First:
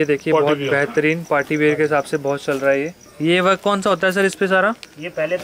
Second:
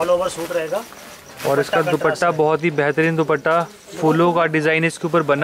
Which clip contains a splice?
first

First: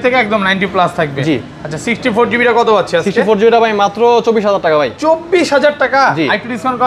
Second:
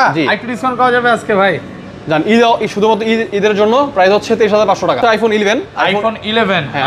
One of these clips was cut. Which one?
second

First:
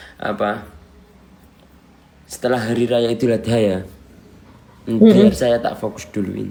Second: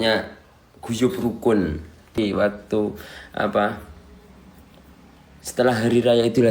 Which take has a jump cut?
second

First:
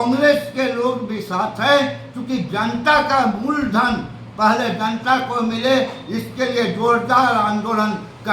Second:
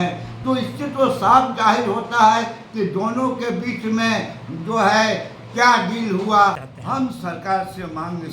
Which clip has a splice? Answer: second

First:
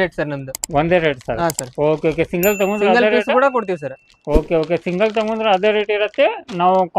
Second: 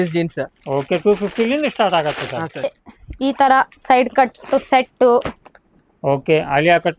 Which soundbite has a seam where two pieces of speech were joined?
second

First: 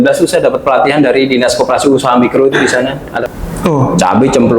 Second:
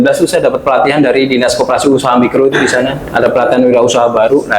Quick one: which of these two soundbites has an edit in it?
first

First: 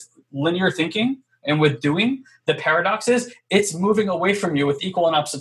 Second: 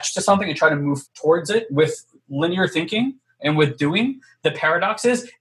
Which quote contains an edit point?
second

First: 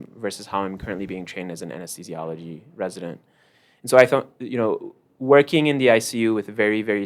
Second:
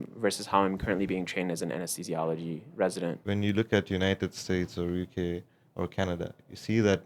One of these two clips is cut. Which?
second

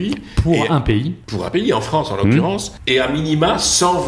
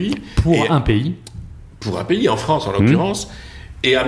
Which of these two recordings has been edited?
first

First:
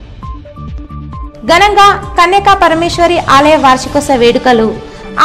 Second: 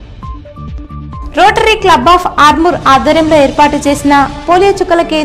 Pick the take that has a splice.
second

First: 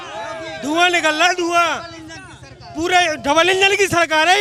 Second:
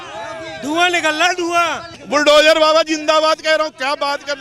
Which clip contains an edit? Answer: second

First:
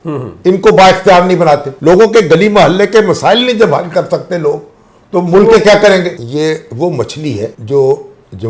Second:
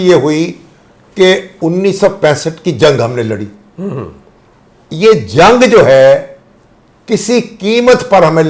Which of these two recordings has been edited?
first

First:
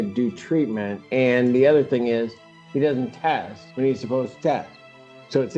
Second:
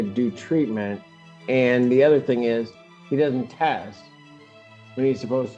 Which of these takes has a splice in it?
first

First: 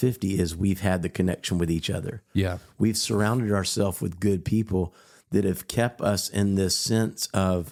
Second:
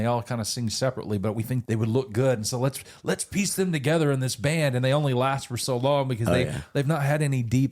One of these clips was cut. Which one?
second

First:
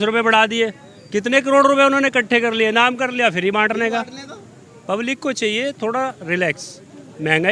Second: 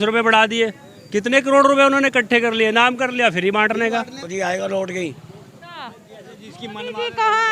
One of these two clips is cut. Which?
second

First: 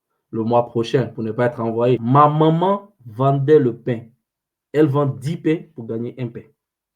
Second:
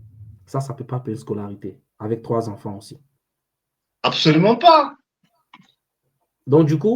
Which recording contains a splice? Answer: first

